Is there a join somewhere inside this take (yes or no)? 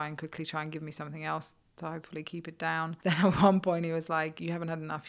yes